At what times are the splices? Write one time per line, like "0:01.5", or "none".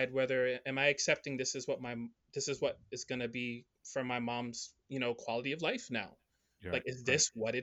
none

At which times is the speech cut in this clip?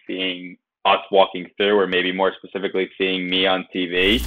none

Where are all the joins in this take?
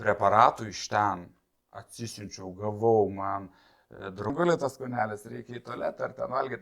0:04.3

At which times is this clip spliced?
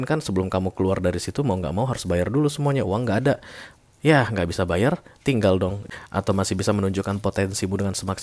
0:05.8

